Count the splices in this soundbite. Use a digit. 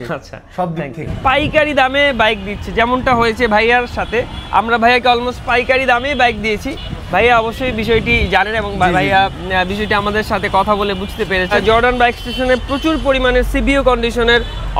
2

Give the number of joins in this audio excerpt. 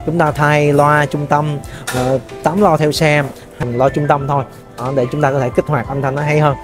1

